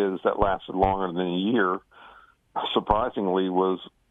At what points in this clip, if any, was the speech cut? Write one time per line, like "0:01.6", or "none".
none